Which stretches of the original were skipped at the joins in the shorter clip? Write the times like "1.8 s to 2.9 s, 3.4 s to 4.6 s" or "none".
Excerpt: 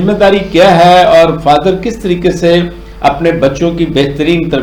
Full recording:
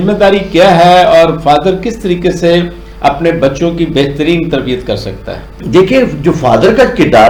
none

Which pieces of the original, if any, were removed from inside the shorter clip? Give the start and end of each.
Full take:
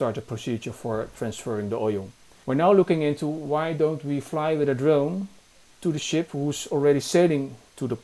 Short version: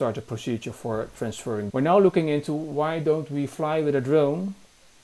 1.7 s to 2.4 s

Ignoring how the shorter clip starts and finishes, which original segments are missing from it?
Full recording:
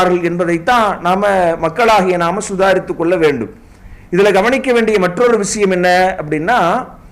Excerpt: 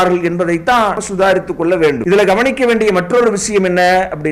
1.0 s to 2.4 s, 3.4 s to 4.1 s

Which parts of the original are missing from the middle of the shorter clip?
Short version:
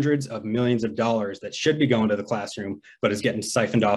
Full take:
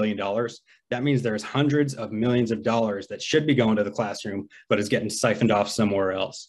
none

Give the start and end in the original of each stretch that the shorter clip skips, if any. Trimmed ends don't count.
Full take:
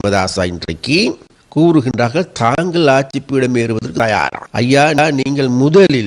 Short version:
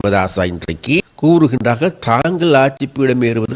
1.0 s to 1.3 s

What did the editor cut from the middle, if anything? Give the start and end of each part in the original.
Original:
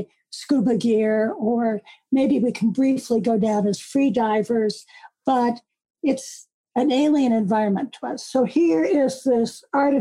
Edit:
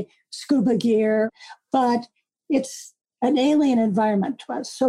1.3 s to 4.9 s

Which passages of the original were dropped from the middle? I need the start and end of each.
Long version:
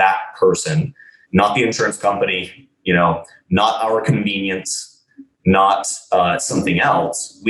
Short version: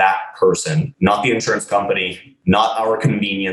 0.9 s to 1.2 s, 2.6 s to 3.3 s

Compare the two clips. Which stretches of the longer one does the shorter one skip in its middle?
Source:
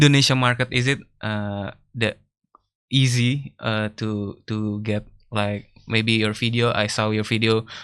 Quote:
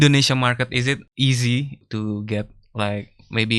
1.1 s to 2.8 s, 3.5 s to 4.4 s

